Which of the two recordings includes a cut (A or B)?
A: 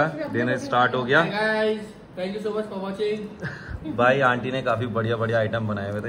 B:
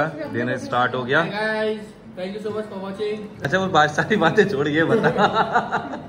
B